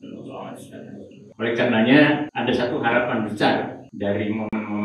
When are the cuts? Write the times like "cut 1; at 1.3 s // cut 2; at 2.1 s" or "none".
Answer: cut 1; at 1.2 s // cut 2; at 2.3 s // cut 3; at 3.8 s